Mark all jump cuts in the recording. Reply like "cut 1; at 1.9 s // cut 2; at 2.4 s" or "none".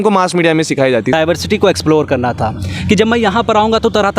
cut 1; at 1.1 s